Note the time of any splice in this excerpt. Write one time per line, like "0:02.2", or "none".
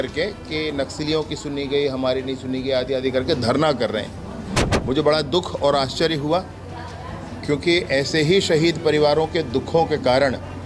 none